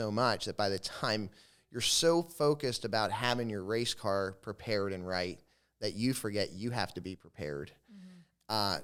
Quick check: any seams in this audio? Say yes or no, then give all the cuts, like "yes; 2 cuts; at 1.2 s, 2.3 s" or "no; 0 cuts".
no; 0 cuts